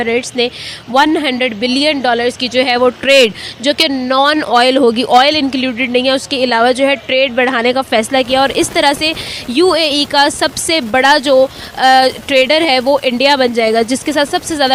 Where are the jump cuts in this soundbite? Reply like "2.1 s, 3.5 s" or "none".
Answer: none